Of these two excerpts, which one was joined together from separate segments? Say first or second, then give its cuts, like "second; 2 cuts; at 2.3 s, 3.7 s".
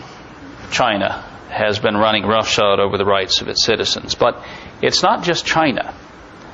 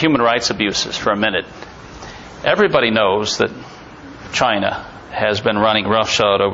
first; 1 cut; at 5.4 s